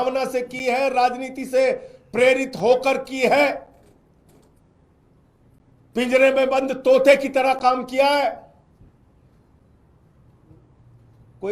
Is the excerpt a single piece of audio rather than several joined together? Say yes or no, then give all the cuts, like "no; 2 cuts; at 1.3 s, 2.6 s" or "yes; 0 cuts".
yes; 0 cuts